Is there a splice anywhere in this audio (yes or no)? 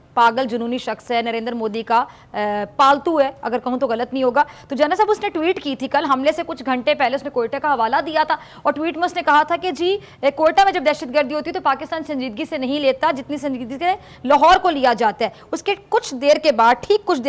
no